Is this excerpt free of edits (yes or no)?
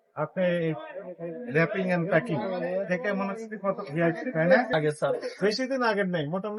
no